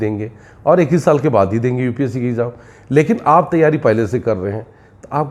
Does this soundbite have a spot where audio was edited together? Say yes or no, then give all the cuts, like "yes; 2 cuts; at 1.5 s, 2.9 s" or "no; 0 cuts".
no; 0 cuts